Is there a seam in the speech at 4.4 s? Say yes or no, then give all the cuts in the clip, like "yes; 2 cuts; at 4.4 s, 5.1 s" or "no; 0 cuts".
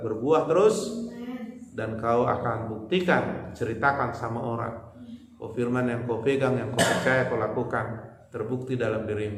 no; 0 cuts